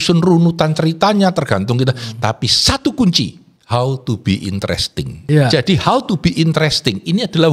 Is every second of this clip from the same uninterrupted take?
no; 2 cuts; at 3.5 s, 5.1 s

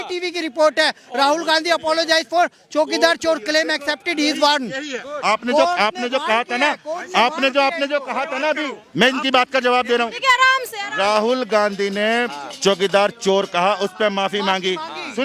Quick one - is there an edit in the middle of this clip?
no; 0 cuts

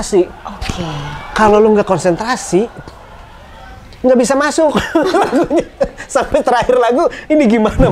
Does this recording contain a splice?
no; 0 cuts

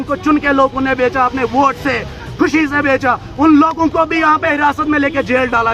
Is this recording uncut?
yes; 0 cuts

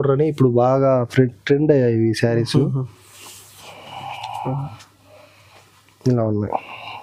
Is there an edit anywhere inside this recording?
no; 0 cuts

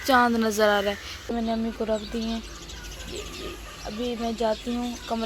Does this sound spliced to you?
yes; 1 cut; at 1.1 s

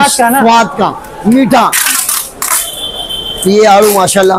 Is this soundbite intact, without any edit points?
yes; 0 cuts

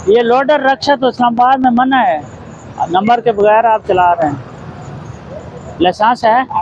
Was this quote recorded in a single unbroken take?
yes; 0 cuts

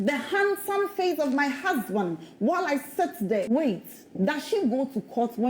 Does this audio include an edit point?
yes; 1 cut; at 3.5 s

